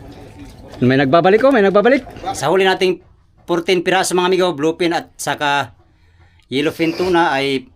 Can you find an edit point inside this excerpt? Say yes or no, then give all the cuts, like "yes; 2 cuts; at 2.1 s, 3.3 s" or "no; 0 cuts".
yes; 1 cut; at 2.2 s